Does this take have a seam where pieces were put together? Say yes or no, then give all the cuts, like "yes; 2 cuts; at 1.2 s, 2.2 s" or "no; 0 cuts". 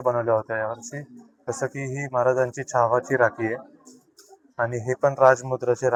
no; 0 cuts